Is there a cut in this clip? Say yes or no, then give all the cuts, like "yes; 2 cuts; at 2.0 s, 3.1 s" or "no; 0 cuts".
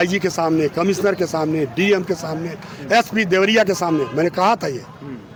no; 0 cuts